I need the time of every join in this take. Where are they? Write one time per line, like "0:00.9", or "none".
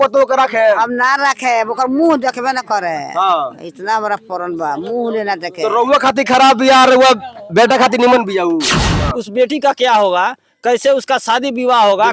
0:09.0